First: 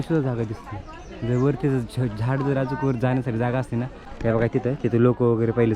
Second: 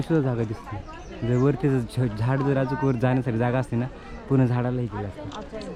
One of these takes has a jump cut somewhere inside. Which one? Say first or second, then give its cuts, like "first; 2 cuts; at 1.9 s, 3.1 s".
first; 1 cut; at 4.0 s